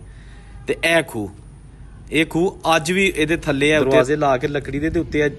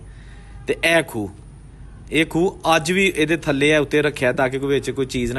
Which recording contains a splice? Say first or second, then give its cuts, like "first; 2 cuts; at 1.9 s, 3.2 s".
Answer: first; 1 cut; at 3.8 s